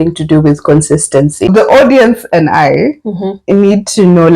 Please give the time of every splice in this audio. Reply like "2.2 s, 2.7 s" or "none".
1.5 s